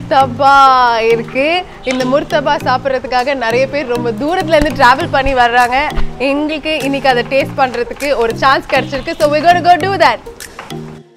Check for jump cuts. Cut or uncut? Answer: uncut